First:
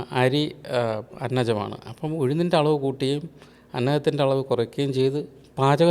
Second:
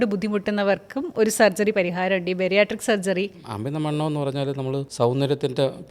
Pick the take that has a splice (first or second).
second